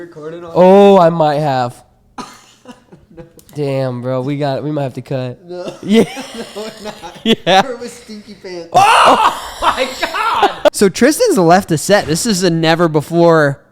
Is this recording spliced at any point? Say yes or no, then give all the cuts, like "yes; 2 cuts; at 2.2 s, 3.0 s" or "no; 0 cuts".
yes; 2 cuts; at 8.8 s, 10.7 s